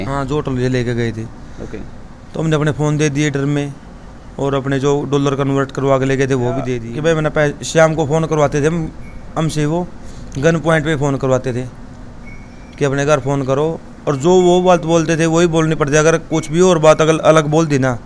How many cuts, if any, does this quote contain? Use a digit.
1